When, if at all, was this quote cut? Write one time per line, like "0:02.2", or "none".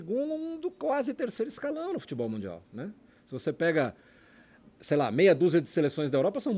none